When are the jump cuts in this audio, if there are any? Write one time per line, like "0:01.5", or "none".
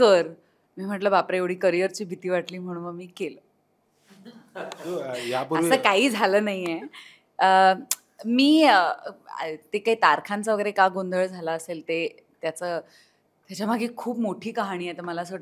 none

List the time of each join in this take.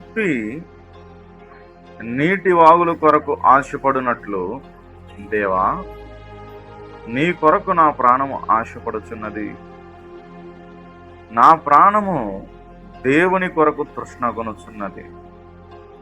0:09.8
0:11.3

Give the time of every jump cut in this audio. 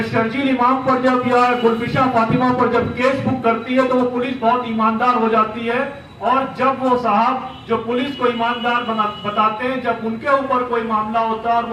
none

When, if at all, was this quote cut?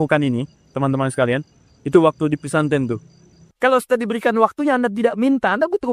0:03.4

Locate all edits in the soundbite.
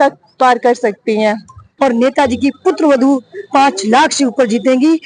0:01.6

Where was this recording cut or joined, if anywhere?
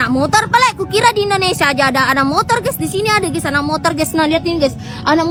none

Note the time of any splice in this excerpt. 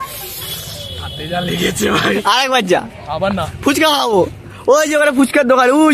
0:02.2

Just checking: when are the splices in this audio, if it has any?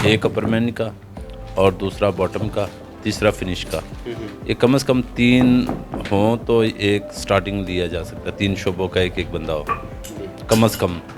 none

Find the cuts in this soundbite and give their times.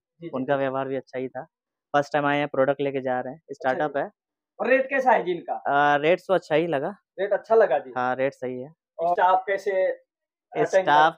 0:09.1

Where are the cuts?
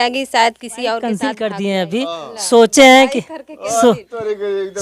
0:01.1

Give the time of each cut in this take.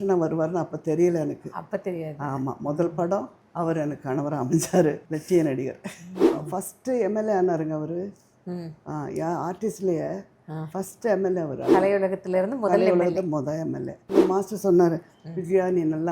0:03.4
0:05.0
0:06.2
0:14.1

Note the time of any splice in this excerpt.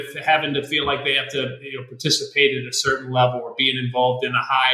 none

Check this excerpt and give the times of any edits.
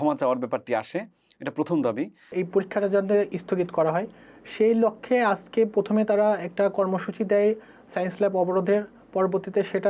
0:02.3

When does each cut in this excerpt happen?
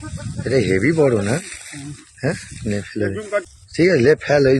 0:03.1

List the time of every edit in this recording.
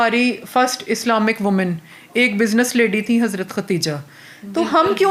none

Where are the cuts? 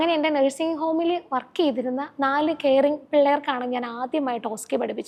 none

